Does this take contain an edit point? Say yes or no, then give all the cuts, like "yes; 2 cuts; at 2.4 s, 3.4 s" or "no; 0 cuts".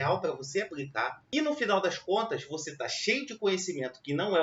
yes; 1 cut; at 1.2 s